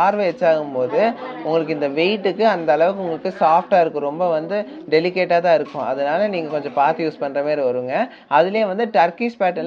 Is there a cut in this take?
no; 0 cuts

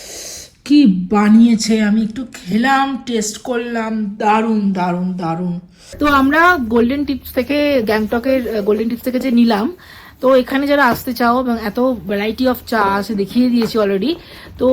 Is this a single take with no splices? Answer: no; 1 cut; at 5.8 s

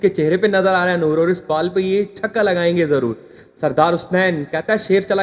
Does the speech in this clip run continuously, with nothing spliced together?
yes; 0 cuts

